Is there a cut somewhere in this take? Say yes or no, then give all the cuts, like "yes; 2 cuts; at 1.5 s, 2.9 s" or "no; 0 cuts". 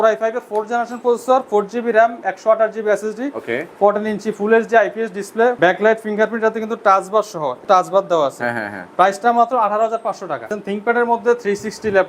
yes; 3 cuts; at 5.6 s, 7.6 s, 10.6 s